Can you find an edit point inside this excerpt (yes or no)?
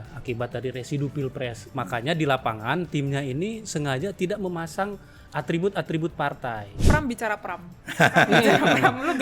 yes